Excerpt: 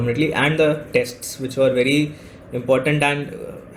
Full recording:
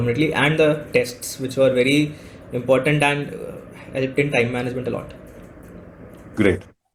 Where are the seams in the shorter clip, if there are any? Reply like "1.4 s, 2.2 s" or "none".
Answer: none